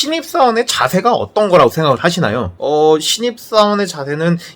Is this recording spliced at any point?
yes; 1 cut; at 2.5 s

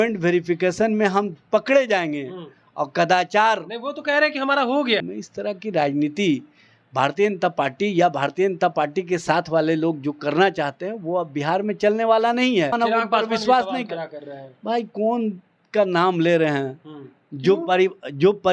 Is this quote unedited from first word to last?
no; 2 cuts; at 5.2 s, 12.8 s

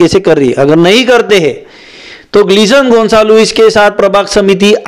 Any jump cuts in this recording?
no; 0 cuts

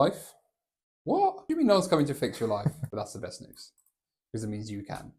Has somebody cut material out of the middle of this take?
yes; 2 cuts; at 1.4 s, 2.8 s

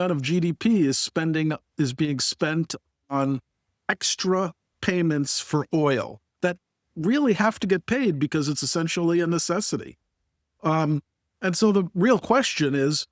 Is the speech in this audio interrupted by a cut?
no; 0 cuts

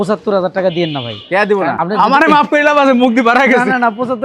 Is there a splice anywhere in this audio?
yes; 1 cut; at 1.8 s

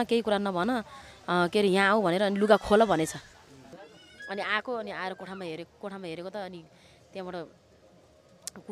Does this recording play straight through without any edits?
no; 1 cut; at 3.6 s

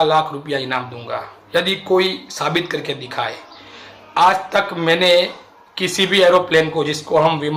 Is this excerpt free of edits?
yes; 0 cuts

